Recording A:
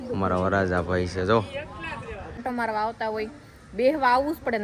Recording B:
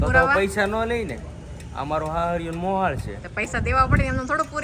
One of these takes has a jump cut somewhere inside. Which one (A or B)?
A